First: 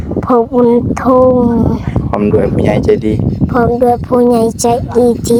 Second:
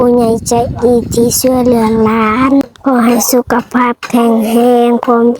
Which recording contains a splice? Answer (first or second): second